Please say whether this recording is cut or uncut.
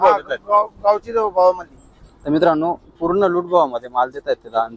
uncut